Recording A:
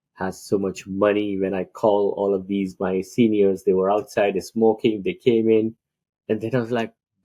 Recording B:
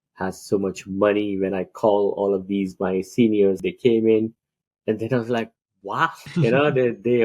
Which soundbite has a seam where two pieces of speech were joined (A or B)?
B